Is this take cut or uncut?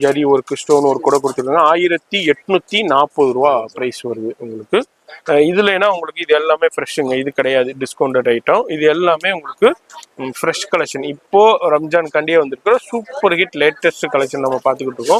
uncut